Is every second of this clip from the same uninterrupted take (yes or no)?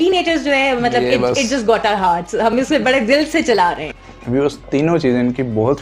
no